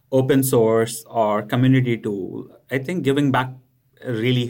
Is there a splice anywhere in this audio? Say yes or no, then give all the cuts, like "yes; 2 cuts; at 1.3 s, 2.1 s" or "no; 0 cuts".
no; 0 cuts